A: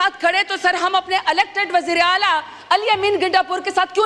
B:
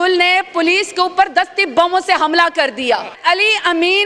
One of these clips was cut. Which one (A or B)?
B